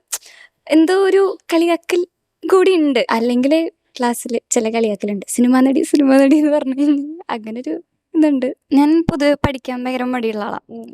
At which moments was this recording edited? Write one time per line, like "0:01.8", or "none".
0:03.1
0:08.6